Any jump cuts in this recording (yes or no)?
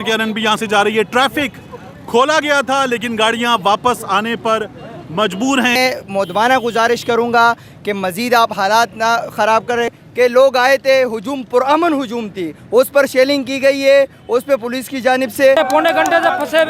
yes